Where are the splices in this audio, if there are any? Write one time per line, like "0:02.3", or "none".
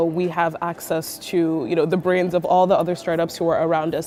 none